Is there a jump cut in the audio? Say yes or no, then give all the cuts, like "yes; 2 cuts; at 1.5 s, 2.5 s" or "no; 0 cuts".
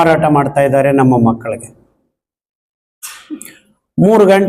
no; 0 cuts